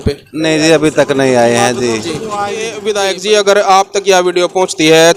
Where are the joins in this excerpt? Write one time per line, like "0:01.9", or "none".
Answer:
0:02.8